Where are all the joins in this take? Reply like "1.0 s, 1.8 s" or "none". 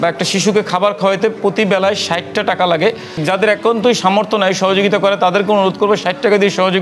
none